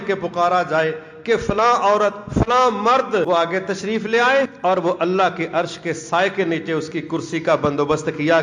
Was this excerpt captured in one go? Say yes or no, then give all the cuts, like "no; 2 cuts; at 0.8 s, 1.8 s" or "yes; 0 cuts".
no; 2 cuts; at 3.3 s, 4.5 s